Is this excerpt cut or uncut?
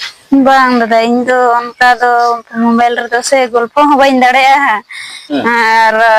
uncut